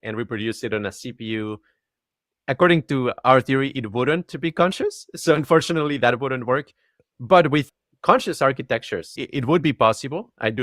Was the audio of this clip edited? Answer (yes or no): yes